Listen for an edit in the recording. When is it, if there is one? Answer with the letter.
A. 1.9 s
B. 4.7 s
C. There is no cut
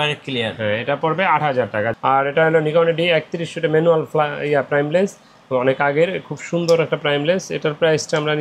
A